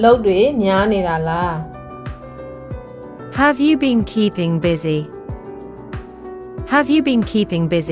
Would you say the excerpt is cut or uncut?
uncut